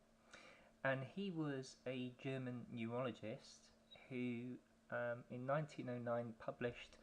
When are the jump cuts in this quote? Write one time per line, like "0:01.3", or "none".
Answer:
0:04.0